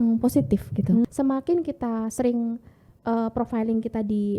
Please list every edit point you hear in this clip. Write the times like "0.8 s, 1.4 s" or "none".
1.0 s